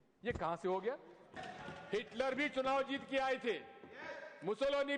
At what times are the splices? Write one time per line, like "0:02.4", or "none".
0:01.5